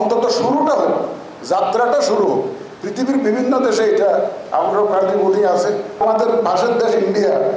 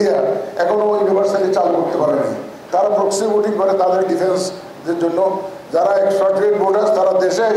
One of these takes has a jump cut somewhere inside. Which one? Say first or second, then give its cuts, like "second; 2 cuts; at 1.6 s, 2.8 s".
first; 1 cut; at 6.0 s